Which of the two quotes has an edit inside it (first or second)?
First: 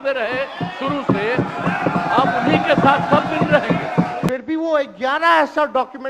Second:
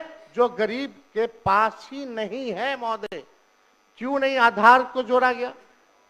first